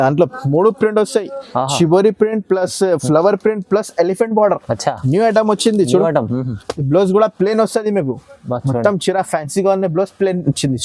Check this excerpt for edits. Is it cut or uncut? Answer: uncut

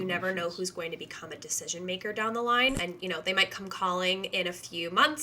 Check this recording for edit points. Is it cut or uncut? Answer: cut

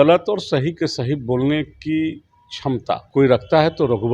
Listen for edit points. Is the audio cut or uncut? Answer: cut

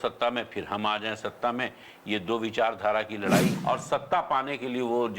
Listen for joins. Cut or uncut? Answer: cut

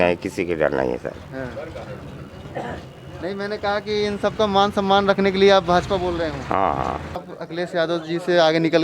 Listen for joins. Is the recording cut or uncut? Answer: cut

